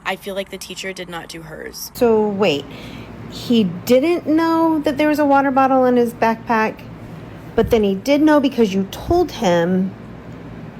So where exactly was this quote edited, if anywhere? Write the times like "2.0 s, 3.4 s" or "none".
1.9 s

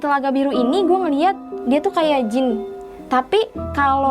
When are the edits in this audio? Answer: 1.5 s

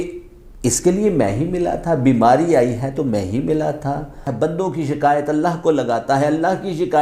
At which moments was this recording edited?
4.2 s

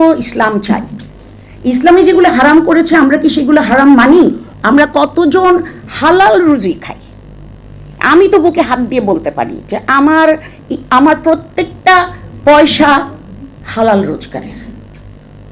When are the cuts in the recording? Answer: 4.5 s

